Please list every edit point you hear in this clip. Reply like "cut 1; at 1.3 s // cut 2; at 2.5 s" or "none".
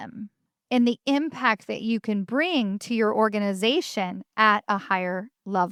none